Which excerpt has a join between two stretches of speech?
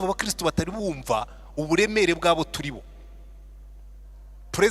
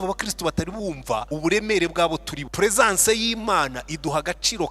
second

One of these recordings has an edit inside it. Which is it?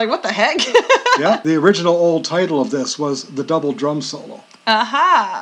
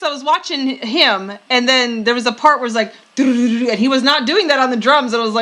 first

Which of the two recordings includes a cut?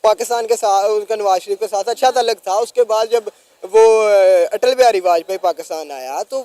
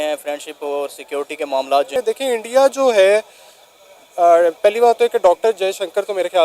second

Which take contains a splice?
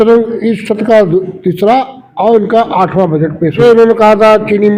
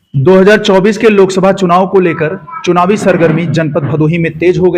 first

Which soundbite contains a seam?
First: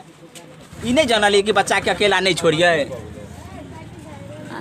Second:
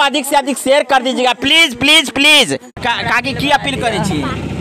second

